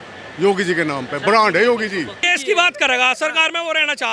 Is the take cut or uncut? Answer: cut